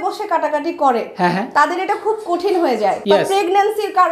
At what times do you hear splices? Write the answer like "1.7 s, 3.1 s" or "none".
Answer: 1.4 s, 3.0 s